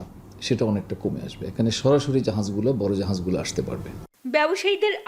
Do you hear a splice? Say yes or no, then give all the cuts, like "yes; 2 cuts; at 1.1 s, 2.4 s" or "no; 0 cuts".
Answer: no; 0 cuts